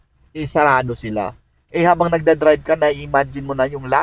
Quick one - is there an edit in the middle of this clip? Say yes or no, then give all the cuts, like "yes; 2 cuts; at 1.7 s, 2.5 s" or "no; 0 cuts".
no; 0 cuts